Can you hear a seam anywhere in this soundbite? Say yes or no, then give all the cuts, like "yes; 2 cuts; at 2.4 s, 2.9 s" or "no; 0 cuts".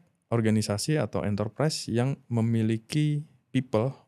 no; 0 cuts